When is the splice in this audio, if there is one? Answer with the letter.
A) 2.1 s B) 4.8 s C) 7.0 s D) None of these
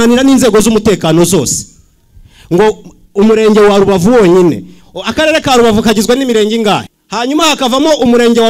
C